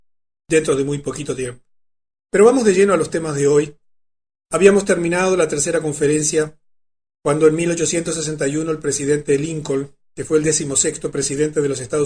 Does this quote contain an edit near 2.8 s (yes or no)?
yes